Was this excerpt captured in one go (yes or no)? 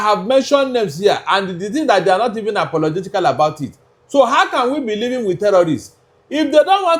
yes